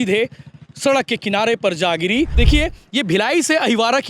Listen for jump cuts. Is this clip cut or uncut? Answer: cut